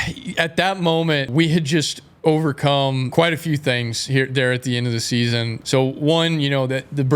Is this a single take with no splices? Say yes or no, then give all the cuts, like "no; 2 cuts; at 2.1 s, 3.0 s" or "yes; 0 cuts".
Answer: no; 3 cuts; at 1.3 s, 3.1 s, 5.6 s